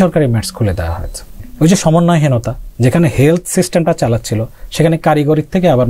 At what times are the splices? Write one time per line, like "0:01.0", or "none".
0:01.5